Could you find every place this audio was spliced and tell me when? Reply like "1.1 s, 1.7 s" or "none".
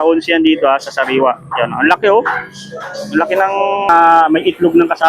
3.9 s